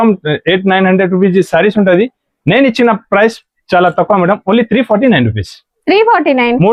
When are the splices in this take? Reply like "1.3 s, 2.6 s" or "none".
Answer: none